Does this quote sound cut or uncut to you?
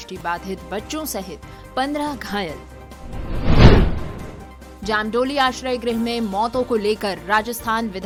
uncut